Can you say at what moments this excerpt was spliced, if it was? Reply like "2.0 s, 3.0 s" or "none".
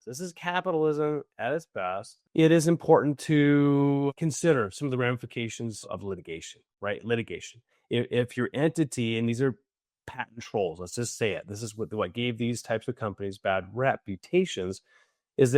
2.2 s